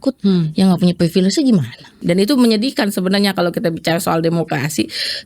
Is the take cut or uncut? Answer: cut